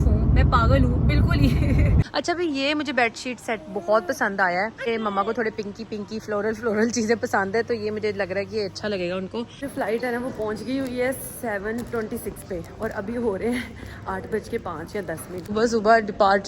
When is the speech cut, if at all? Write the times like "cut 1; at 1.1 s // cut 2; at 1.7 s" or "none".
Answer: cut 1; at 2.1 s // cut 2; at 4.9 s // cut 3; at 9.6 s // cut 4; at 15.5 s